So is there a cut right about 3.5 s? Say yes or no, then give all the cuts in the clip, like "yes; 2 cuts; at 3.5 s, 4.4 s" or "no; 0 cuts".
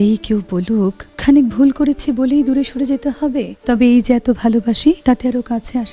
yes; 3 cuts; at 1.1 s, 3.5 s, 5.0 s